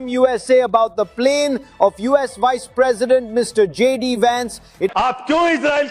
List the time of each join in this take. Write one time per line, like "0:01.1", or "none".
0:04.9